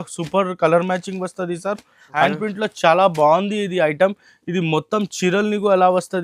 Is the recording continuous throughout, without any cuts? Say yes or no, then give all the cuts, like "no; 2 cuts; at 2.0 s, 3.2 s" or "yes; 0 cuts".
no; 1 cut; at 2.3 s